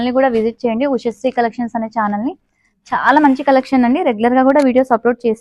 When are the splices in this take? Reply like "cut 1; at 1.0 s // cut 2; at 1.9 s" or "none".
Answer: none